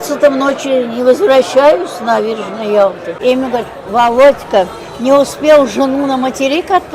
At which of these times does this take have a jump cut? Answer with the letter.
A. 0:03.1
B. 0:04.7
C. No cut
A